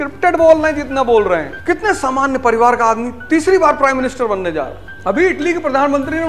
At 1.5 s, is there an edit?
yes; 2 cuts; at 1.5 s, 4.8 s

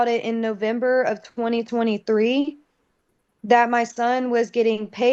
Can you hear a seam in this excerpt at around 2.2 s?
no; 0 cuts

